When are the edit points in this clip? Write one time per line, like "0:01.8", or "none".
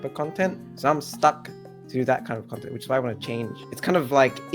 0:03.6